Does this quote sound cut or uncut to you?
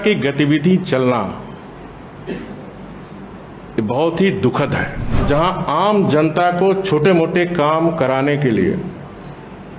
cut